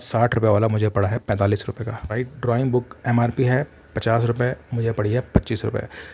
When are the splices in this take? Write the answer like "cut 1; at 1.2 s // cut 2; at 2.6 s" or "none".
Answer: cut 1; at 2.0 s

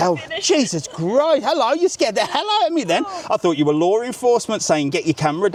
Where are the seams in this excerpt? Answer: none

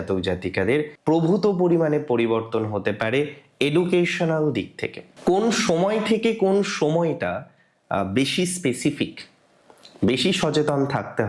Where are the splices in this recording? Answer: cut 1; at 5.0 s

